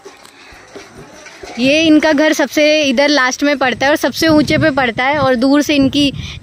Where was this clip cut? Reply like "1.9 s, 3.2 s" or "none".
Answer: 1.4 s

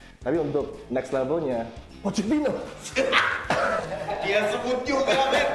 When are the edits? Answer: none

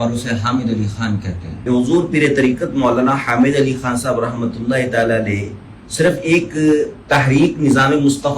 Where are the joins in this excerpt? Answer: 1.5 s

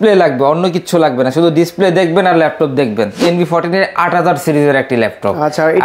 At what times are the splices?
3.2 s

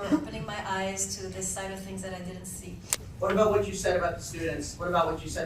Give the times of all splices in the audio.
3.0 s

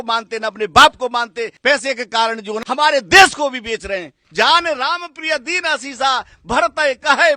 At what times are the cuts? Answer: 1.5 s, 2.5 s, 4.2 s

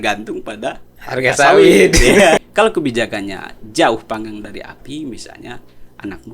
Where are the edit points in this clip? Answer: 2.4 s

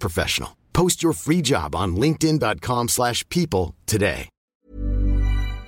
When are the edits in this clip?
4.6 s

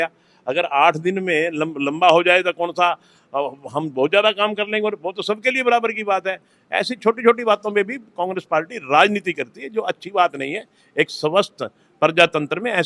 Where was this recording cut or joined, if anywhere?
none

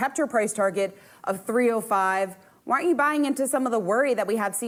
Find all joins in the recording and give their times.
none

